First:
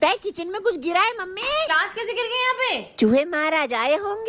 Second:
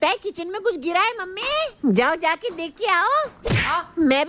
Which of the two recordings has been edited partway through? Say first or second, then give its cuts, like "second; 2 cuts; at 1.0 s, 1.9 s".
first; 1 cut; at 1.7 s